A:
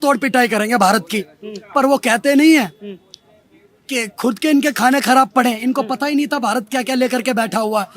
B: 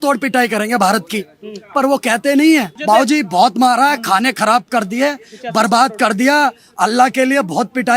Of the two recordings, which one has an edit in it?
B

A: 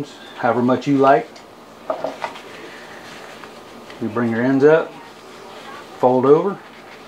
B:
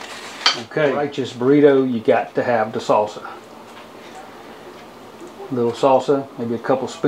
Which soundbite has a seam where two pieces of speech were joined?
B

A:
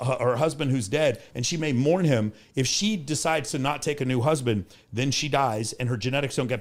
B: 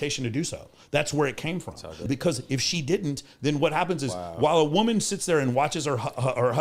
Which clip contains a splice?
B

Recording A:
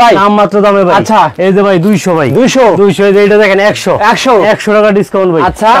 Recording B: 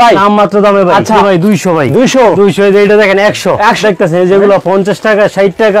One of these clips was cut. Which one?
B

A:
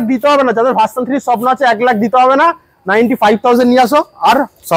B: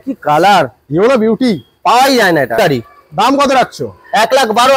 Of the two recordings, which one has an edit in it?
B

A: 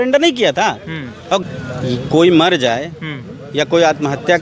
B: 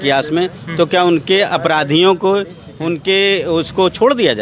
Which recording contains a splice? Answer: A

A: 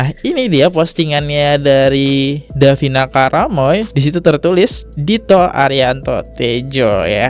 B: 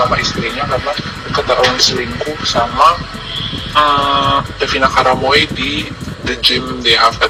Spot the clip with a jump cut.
A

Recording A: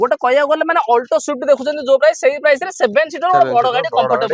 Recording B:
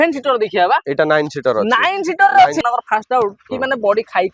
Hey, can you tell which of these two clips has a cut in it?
B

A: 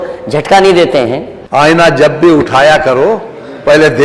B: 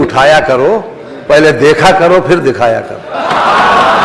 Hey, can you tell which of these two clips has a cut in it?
A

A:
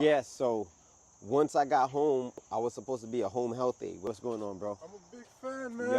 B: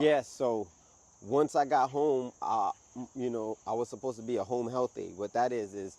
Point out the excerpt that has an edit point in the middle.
A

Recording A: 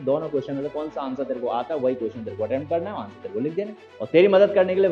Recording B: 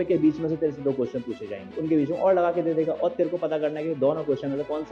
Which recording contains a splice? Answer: A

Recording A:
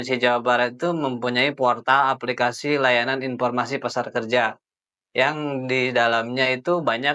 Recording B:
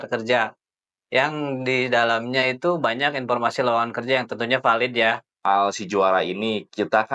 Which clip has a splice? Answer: B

